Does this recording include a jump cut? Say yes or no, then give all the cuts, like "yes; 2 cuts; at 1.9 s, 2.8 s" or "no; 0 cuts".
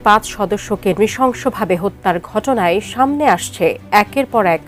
no; 0 cuts